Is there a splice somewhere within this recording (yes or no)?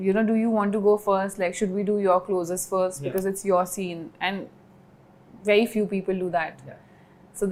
no